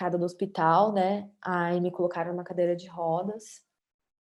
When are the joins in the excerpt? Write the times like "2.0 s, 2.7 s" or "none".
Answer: none